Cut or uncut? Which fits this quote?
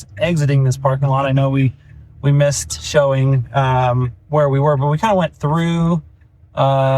uncut